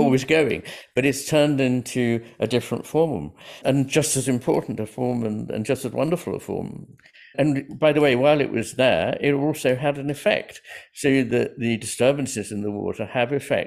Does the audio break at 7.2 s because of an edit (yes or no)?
no